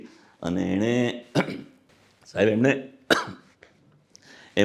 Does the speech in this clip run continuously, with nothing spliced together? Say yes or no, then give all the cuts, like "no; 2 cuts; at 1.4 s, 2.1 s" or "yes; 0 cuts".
yes; 0 cuts